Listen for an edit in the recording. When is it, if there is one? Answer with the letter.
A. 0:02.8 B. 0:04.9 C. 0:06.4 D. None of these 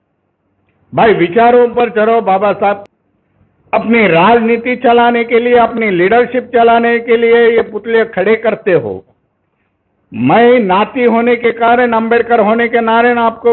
A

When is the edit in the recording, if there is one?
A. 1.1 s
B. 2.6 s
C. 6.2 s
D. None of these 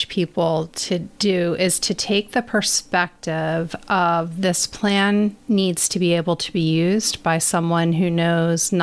A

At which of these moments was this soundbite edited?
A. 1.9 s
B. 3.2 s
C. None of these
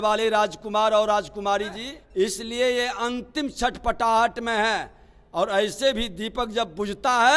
A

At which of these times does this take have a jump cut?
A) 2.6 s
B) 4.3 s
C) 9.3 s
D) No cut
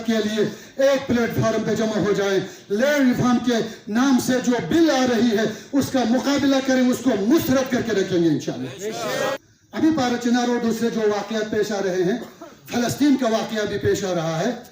C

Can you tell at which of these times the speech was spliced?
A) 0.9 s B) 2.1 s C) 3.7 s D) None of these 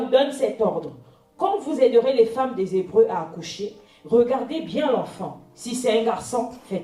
D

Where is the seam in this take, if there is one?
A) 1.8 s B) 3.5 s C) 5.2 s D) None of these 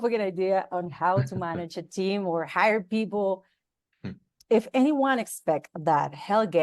B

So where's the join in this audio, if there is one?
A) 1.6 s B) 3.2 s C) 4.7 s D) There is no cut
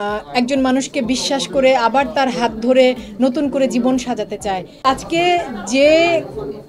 C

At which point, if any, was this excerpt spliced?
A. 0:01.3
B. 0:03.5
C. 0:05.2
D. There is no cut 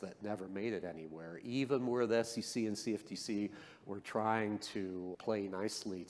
C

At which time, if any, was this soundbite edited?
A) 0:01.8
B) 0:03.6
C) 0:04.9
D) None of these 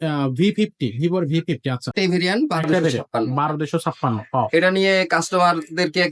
A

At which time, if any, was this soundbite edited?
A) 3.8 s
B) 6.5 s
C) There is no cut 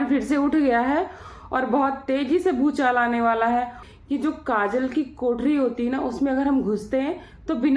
A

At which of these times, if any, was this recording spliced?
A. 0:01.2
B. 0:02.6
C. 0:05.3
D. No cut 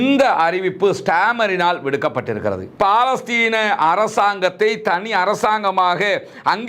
B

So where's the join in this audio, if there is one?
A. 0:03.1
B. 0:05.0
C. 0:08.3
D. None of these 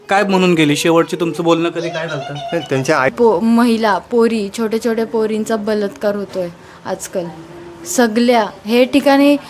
A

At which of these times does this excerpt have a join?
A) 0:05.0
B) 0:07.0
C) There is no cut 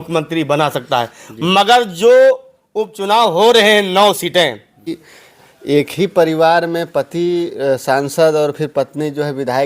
A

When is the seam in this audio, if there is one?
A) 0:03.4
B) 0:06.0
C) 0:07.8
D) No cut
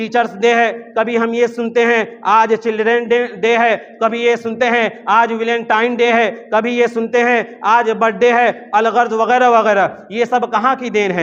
D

